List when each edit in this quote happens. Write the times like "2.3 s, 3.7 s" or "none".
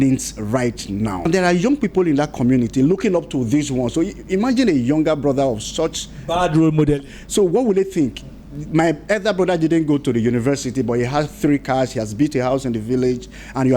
1.2 s

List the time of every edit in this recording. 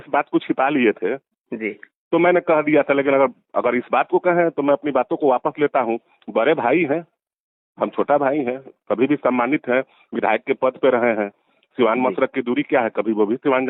none

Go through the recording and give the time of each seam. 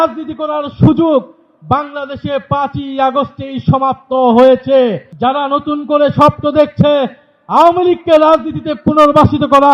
5.1 s

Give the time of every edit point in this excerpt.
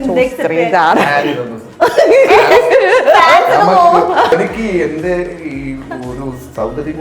4.3 s

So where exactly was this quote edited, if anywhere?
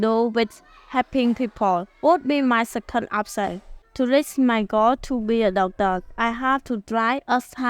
3.8 s

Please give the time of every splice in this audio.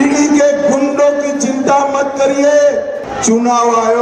3.1 s

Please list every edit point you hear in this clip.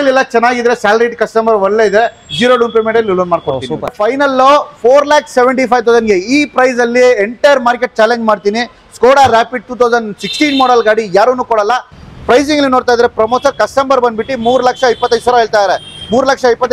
3.9 s, 11.9 s

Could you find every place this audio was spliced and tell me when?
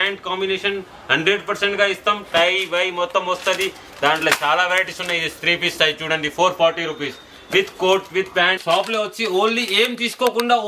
8.6 s

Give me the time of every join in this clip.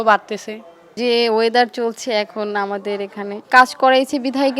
1.0 s, 3.4 s

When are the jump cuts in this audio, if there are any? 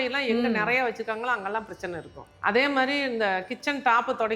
2.3 s

